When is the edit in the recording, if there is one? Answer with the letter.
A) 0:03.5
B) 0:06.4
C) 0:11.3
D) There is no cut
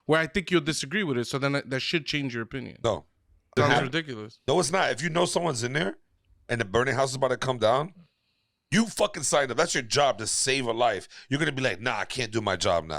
A